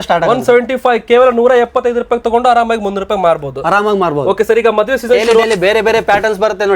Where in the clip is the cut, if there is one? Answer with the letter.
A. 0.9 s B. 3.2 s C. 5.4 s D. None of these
C